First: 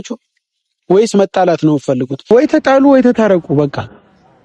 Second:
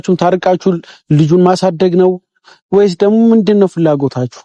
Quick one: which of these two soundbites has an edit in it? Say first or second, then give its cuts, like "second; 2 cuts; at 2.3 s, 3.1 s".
first; 1 cut; at 2.2 s